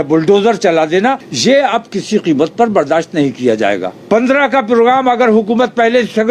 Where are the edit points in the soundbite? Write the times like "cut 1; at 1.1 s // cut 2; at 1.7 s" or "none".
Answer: cut 1; at 1.3 s // cut 2; at 3.9 s